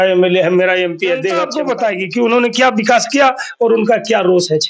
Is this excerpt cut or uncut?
cut